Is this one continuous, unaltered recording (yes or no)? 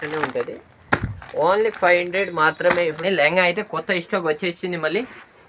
no